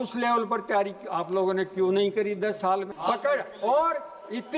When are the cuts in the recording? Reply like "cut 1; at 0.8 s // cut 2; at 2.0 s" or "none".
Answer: cut 1; at 2.9 s